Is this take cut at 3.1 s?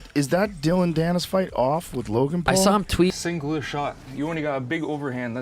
yes; 1 cut; at 3.1 s

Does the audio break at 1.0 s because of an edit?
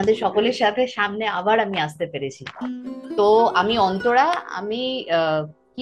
no; 1 cut; at 3.0 s

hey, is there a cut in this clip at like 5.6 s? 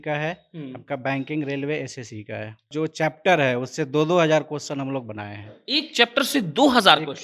no; 1 cut; at 2.7 s

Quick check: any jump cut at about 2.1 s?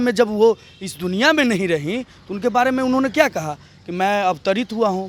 no; 0 cuts

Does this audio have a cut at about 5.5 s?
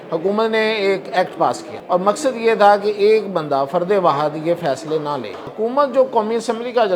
yes; 2 cuts; at 1.7 s, 5.5 s

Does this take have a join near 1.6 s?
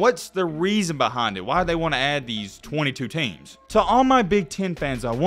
no; 1 cut; at 3.5 s

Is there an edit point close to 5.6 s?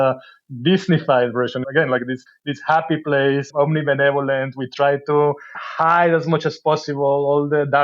yes; 4 cuts; at 1.6 s, 2.3 s, 3.5 s, 5.6 s

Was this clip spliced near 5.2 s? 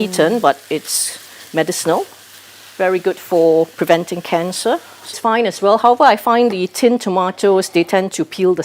yes; 1 cut; at 5.2 s

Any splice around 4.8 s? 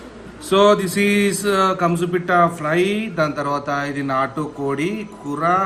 no; 0 cuts

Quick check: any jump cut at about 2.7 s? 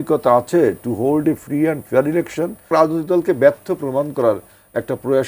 yes; 1 cut; at 2.7 s

